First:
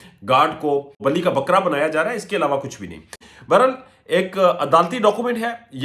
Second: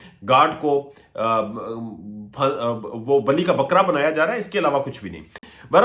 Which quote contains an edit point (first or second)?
first